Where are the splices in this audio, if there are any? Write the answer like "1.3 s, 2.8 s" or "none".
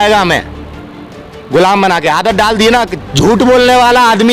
2.9 s